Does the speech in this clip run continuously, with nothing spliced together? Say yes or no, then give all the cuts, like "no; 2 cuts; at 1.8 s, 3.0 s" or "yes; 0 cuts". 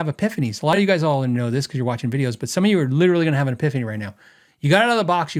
yes; 0 cuts